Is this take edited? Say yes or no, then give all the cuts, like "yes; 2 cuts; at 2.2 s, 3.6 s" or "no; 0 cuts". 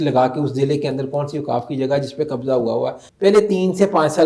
yes; 1 cut; at 3.0 s